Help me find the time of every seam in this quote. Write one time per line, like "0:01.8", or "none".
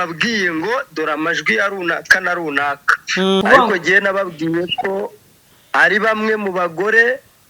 0:03.4